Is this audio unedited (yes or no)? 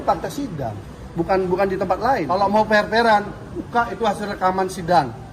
no